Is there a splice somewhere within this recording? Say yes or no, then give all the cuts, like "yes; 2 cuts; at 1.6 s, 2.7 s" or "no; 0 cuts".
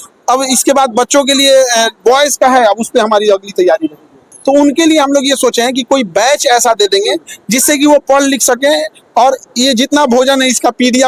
yes; 1 cut; at 4.3 s